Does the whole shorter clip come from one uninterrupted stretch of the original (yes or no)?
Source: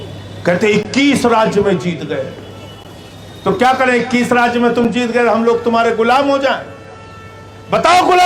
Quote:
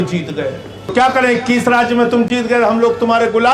no